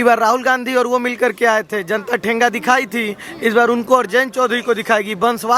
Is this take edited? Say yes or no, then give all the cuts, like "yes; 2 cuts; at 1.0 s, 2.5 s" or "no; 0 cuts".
no; 0 cuts